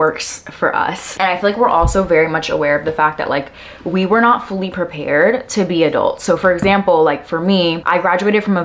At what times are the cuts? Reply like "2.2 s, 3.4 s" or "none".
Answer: none